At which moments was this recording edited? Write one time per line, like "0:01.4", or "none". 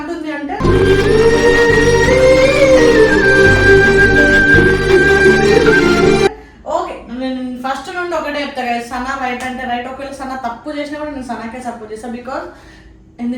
none